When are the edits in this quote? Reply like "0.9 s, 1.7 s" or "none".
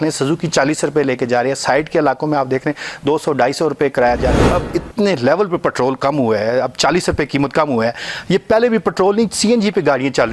4.4 s

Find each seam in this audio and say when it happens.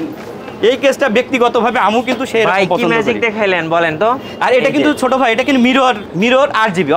6.1 s

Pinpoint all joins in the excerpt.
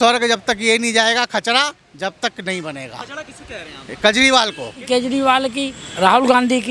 4.8 s, 5.8 s

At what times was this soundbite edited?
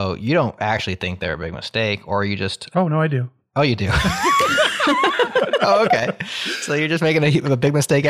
none

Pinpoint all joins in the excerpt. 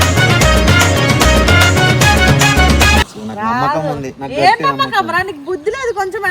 3.0 s

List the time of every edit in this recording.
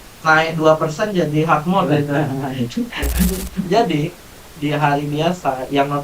3.7 s

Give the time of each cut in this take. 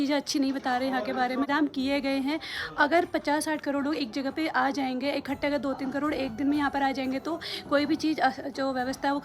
1.5 s

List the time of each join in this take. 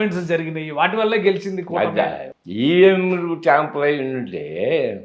2.3 s

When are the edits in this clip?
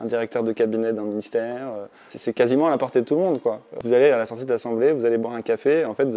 2.1 s, 3.8 s

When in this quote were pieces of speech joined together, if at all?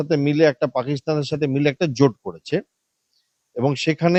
none

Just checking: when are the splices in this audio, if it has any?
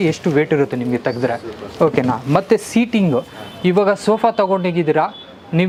none

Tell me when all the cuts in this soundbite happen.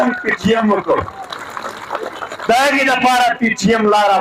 none

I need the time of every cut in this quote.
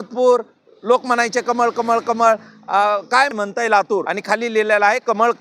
3.3 s, 4.1 s

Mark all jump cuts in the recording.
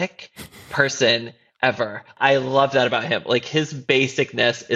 2.1 s

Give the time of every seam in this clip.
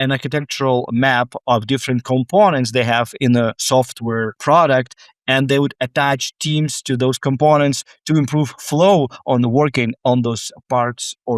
4.4 s

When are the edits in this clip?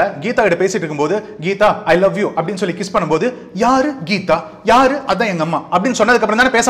none

